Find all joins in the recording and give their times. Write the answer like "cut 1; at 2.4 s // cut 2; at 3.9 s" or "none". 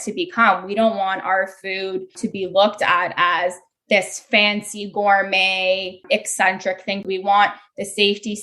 cut 1; at 2.1 s // cut 2; at 6.0 s // cut 3; at 7.1 s